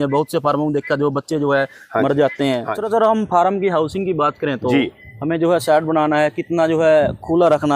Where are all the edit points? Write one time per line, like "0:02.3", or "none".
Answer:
0:02.7